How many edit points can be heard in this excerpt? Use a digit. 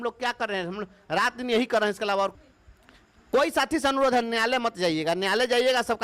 1